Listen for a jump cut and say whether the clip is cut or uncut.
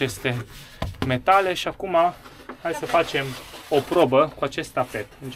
uncut